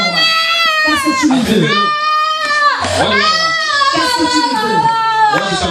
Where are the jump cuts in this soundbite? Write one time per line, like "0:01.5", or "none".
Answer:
none